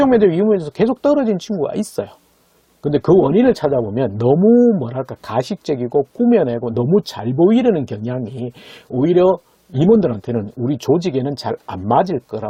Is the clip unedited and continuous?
yes; 0 cuts

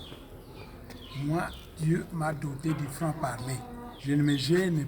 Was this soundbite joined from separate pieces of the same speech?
yes; 1 cut; at 3.9 s

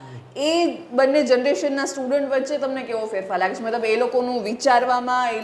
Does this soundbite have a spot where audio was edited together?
no; 0 cuts

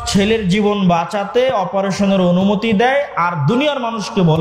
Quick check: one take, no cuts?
yes; 0 cuts

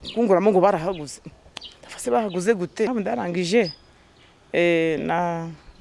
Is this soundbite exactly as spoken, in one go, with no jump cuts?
no; 1 cut; at 2.9 s

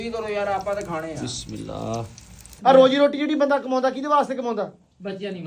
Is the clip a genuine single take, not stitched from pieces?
no; 1 cut; at 2.4 s

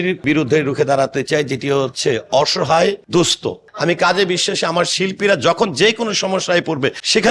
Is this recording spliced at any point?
yes; 1 cut; at 3.7 s

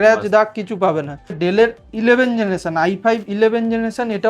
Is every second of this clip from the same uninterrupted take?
no; 1 cut; at 1.4 s

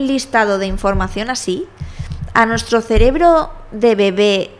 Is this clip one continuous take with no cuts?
yes; 0 cuts

